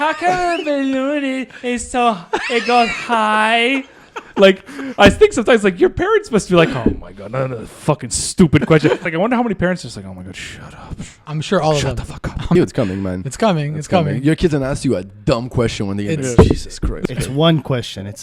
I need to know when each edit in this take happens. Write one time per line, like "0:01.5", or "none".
0:09.0
0:12.6
0:16.9